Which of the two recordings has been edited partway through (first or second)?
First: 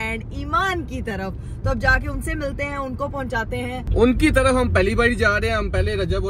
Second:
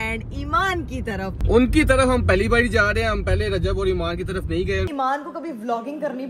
second